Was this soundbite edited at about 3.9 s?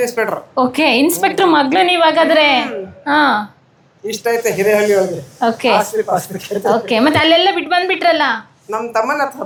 no; 0 cuts

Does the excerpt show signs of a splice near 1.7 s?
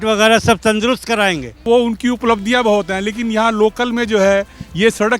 yes; 1 cut; at 1.7 s

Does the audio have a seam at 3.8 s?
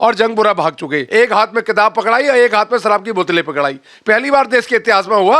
no; 1 cut; at 1.0 s

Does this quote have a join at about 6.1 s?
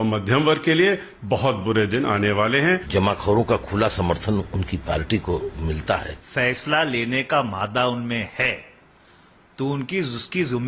yes; 2 cuts; at 2.8 s, 6.1 s

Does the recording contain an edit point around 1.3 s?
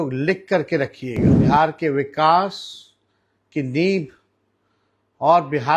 yes; 1 cut; at 1.3 s

